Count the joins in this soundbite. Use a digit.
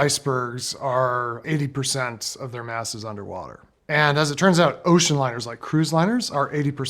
2